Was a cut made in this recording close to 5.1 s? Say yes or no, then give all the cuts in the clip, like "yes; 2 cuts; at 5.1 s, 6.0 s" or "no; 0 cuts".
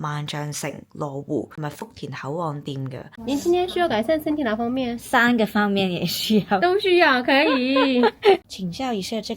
no; 3 cuts; at 1.5 s, 3.1 s, 8.5 s